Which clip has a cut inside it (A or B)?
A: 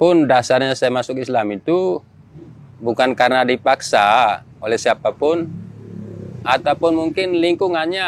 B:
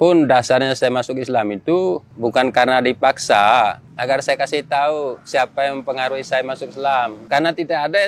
B